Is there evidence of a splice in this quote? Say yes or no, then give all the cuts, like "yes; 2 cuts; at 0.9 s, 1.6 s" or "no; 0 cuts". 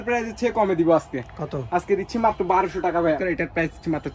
yes; 1 cut; at 3.3 s